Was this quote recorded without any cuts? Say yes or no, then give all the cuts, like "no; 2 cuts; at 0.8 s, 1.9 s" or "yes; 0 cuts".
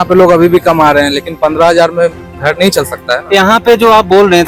yes; 0 cuts